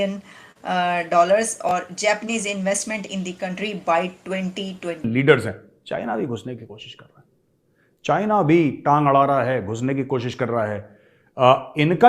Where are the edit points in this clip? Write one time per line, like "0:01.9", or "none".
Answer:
0:05.0